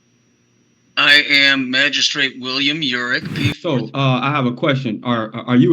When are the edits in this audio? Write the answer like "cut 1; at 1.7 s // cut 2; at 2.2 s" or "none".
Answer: cut 1; at 3.5 s